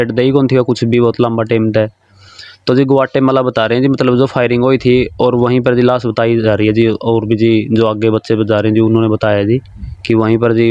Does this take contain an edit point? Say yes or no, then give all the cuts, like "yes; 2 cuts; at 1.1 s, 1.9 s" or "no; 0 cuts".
no; 0 cuts